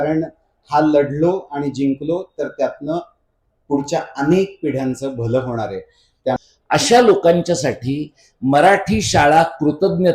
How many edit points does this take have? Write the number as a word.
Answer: one